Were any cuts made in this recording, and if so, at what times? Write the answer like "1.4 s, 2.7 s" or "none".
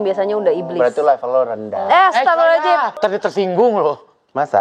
2.9 s